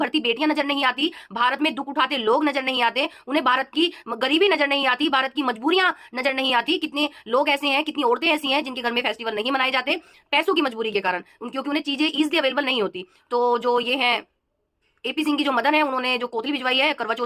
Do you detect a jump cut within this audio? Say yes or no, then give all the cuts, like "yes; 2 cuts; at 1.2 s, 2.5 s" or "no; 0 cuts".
no; 0 cuts